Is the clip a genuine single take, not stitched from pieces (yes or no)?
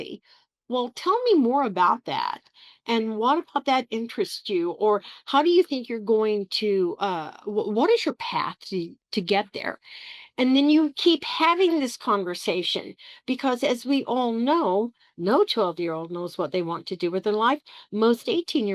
yes